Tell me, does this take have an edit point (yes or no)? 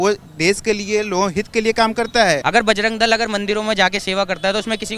yes